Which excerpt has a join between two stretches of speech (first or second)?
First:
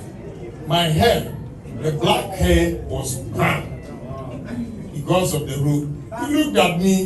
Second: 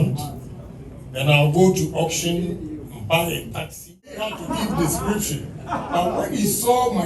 second